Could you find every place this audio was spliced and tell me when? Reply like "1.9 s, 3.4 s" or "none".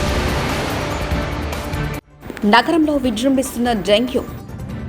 2.1 s